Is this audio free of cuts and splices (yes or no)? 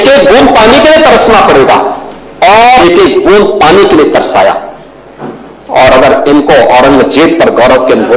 no